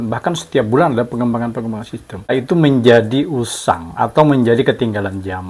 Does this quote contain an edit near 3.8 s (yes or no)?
no